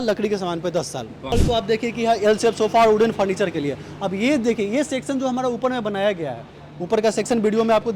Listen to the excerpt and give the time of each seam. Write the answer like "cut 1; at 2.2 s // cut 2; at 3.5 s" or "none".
cut 1; at 1.1 s